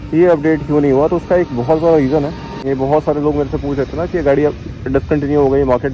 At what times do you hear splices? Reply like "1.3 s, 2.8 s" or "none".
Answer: 2.7 s